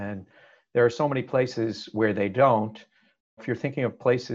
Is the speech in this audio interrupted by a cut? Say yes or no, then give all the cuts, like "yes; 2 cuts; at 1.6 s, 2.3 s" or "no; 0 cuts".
yes; 1 cut; at 3.4 s